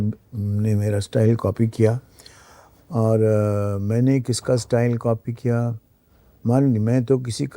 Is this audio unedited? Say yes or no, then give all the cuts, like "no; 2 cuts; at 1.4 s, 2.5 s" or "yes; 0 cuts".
yes; 0 cuts